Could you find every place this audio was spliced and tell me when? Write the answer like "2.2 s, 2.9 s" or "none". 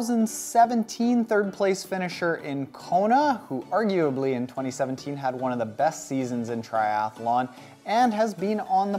5.7 s